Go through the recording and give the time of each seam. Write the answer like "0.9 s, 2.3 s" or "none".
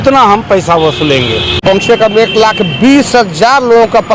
1.6 s